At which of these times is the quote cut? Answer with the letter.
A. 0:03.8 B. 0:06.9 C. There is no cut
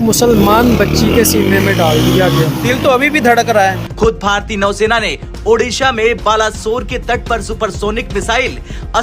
A